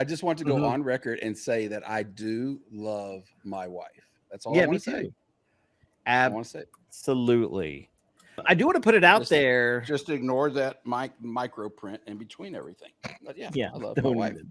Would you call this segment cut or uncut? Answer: cut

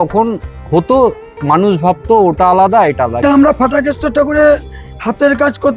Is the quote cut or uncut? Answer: cut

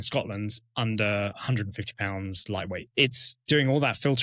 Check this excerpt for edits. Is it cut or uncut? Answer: cut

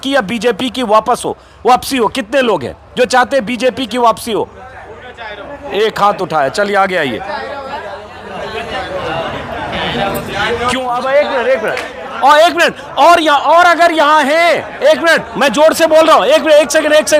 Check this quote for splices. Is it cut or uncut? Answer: uncut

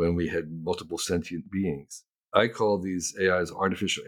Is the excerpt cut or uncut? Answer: cut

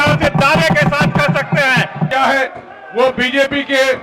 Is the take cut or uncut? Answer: cut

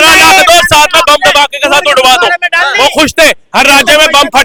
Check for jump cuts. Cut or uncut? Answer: uncut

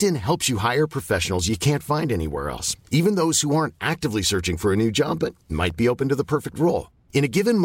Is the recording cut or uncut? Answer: uncut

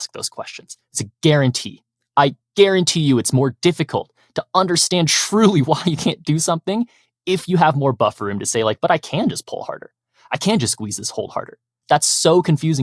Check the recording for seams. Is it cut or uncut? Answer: cut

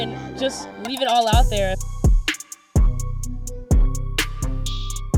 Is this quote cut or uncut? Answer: uncut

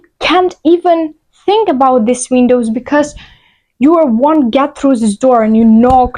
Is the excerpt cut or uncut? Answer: uncut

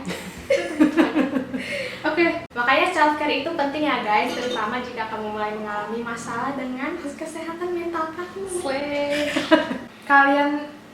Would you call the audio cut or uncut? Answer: cut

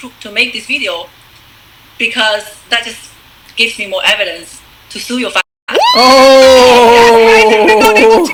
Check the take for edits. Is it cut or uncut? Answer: uncut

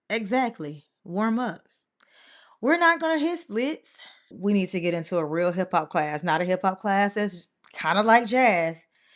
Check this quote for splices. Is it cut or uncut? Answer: cut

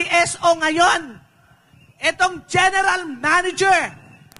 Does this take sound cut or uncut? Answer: uncut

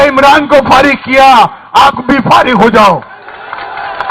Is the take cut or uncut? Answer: uncut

